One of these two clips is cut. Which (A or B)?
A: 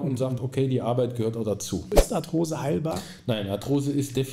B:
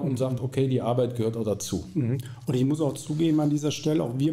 A